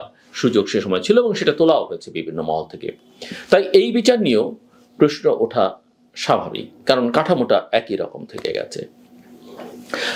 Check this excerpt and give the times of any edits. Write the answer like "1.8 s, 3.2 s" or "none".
none